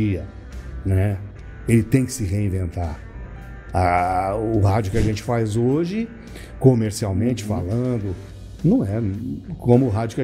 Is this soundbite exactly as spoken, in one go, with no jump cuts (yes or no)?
yes